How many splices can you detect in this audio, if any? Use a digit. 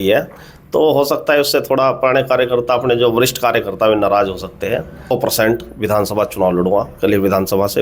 1